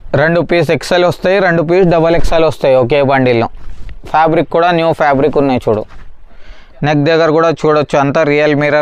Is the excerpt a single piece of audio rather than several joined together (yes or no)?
yes